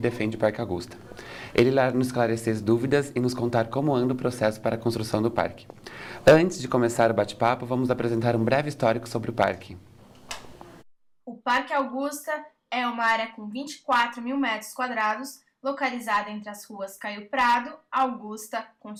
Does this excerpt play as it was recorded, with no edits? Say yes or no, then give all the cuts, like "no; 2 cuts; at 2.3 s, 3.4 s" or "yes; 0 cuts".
yes; 0 cuts